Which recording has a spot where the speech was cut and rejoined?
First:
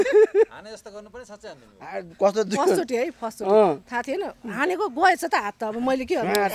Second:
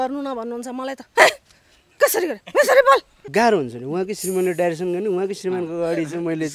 second; 1 cut; at 3.2 s

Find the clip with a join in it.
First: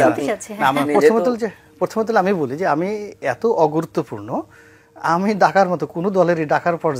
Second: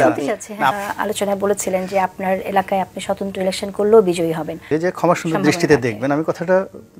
second; 2 cuts; at 0.7 s, 4.7 s

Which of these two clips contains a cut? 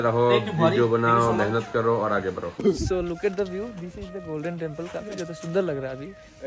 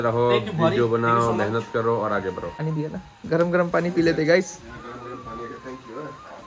first; 1 cut; at 2.6 s

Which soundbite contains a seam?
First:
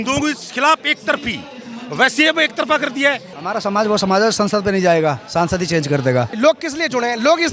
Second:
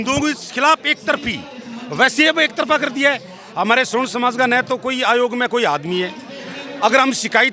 first; 2 cuts; at 3.3 s, 6.3 s

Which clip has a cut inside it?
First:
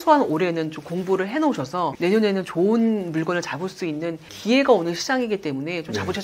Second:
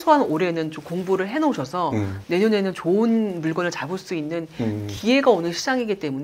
first; 2 cuts; at 1.9 s, 4.2 s

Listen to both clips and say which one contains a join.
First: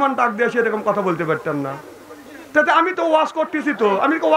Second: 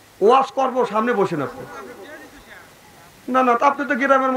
second; 1 cut; at 2.8 s

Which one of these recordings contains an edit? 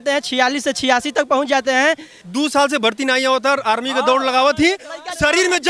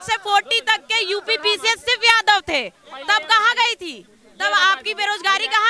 first; 1 cut; at 2.1 s

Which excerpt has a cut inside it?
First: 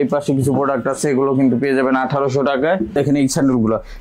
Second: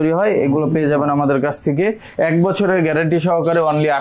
first; 1 cut; at 3.0 s

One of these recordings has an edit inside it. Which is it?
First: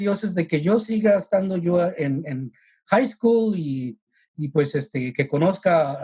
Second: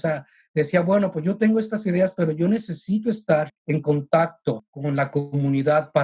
second; 2 cuts; at 3.6 s, 4.7 s

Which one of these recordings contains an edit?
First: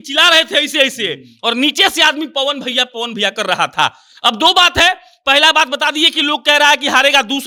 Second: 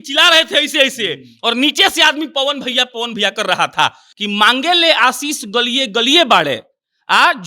second; 1 cut; at 4.1 s

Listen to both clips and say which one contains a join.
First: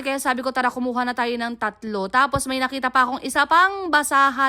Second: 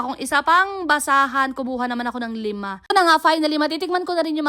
second; 1 cut; at 2.9 s

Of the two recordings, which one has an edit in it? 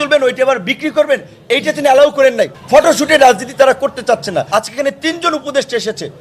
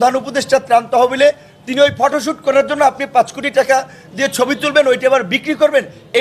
first; 2 cuts; at 2.5 s, 4.5 s

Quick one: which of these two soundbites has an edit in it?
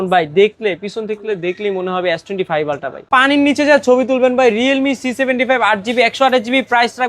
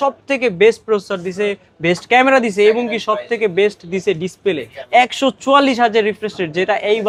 first; 1 cut; at 3.1 s

